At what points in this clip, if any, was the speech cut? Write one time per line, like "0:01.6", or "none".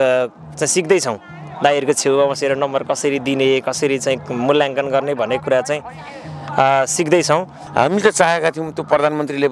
0:07.6